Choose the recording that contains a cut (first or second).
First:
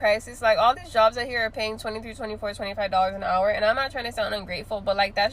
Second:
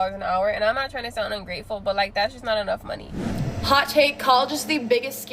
second